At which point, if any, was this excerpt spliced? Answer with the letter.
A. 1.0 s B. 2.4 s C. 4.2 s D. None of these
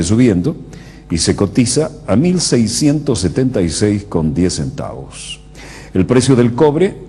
D